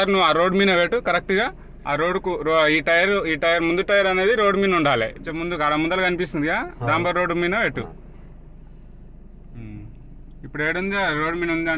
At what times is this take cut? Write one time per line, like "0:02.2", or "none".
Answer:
0:05.3
0:09.5